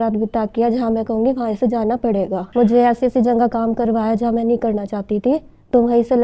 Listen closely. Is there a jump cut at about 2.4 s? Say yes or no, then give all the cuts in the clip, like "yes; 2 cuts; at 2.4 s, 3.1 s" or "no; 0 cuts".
yes; 1 cut; at 2.4 s